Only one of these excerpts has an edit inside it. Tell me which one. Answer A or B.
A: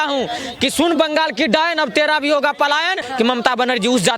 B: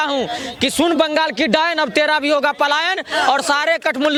A